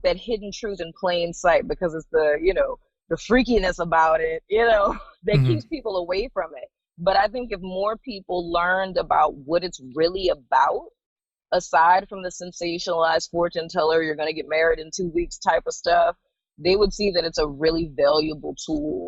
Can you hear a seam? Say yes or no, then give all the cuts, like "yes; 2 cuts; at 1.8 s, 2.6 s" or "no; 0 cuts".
no; 0 cuts